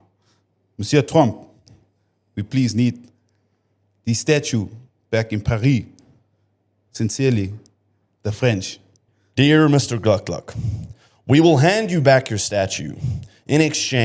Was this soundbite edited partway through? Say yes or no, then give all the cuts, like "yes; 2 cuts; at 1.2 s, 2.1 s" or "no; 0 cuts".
no; 0 cuts